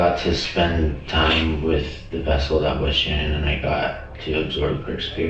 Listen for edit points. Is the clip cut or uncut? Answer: uncut